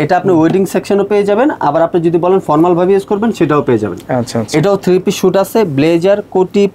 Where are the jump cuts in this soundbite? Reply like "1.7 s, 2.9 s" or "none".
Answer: none